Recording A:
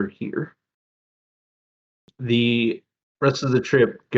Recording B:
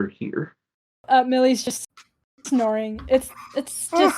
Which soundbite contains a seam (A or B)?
B